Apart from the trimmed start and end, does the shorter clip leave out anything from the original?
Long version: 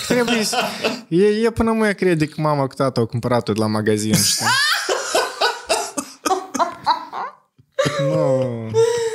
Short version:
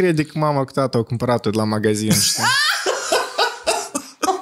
no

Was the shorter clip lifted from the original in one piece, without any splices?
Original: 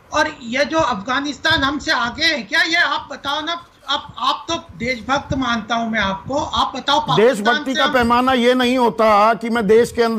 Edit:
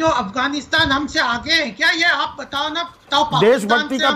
no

